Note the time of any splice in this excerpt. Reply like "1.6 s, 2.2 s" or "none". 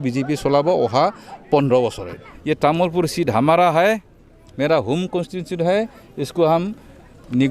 2.3 s